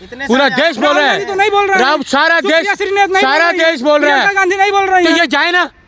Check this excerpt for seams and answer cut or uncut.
uncut